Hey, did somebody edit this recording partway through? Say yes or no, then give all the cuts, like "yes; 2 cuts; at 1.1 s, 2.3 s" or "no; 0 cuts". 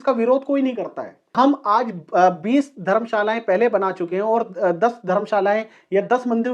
yes; 1 cut; at 1.3 s